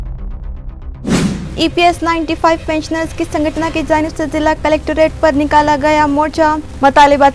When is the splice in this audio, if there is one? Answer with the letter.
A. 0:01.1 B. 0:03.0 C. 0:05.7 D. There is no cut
A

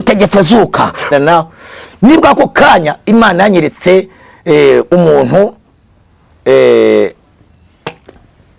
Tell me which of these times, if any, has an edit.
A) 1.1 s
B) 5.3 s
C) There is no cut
A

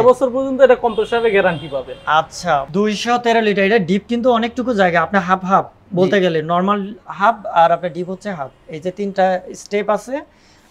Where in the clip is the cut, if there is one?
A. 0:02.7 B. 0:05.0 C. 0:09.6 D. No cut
A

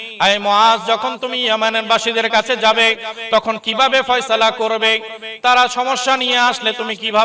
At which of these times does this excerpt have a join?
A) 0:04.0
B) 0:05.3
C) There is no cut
C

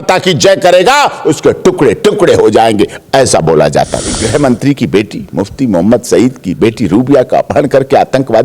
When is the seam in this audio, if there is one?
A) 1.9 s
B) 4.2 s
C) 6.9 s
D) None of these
B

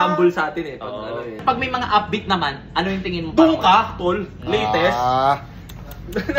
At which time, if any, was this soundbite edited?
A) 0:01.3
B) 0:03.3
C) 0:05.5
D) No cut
A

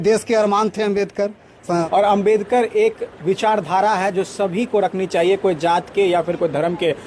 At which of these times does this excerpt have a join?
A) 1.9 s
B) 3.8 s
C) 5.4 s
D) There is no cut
A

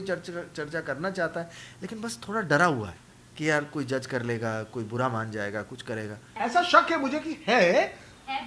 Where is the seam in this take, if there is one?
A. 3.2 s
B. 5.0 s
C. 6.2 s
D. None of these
C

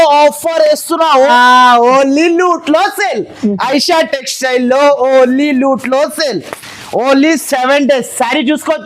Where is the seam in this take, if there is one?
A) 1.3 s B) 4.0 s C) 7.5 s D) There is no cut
A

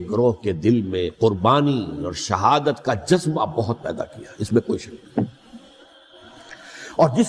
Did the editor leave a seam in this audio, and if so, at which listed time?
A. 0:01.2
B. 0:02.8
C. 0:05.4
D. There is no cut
D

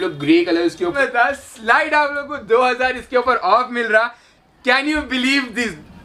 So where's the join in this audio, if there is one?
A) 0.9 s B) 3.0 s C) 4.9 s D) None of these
A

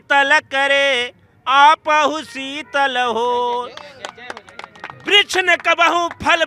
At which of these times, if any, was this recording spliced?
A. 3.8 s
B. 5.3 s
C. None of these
C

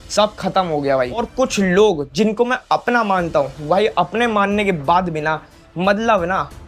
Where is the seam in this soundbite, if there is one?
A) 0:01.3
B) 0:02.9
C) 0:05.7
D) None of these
A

